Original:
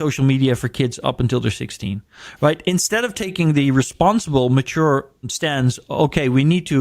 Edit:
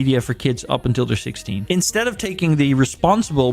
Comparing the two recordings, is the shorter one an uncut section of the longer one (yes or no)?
no